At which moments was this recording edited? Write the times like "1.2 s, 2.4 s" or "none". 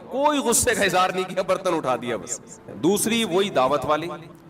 2.6 s